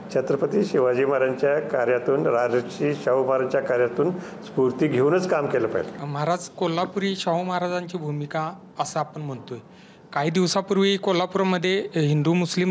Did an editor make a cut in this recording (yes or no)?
no